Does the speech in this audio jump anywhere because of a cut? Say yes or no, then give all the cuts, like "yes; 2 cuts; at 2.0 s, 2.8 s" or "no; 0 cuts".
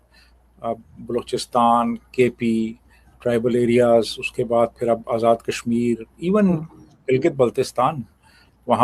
no; 0 cuts